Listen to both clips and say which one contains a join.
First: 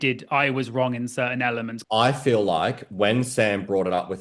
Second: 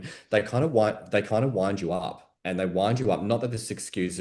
first; 1 cut; at 1.8 s

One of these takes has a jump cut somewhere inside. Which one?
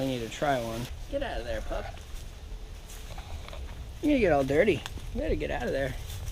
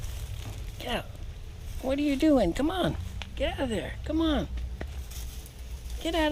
first; 1 cut; at 1.0 s

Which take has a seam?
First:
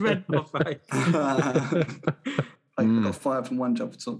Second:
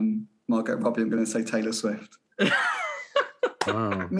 first; 1 cut; at 2.6 s

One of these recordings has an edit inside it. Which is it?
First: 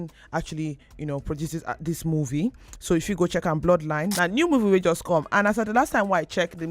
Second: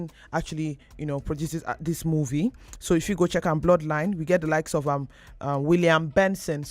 first; 1 cut; at 4.1 s

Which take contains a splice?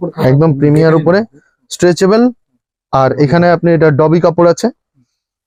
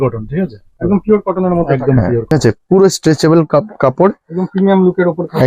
second; 1 cut; at 2.3 s

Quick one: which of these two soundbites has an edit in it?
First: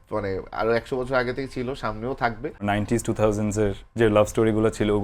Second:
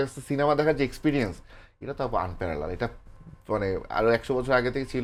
first; 1 cut; at 2.6 s

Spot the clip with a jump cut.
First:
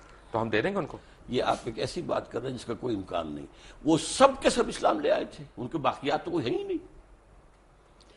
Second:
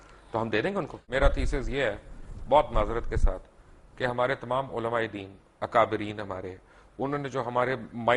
second; 1 cut; at 1.0 s

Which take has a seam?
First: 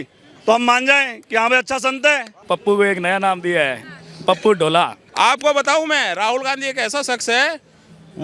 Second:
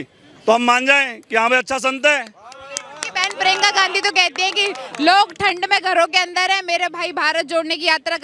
first; 2 cuts; at 2.3 s, 5.0 s

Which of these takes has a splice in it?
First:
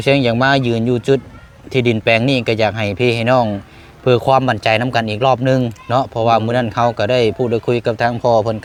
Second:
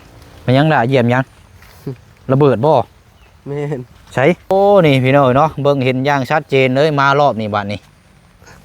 second; 1 cut; at 4.5 s

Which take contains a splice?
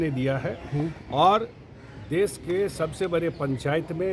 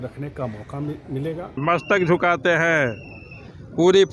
second; 1 cut; at 1.6 s

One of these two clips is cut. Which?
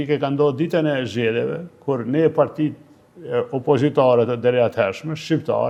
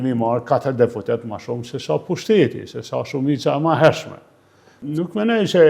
second; 1 cut; at 4.7 s

